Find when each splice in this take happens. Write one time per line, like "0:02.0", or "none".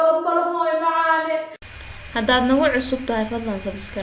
0:01.7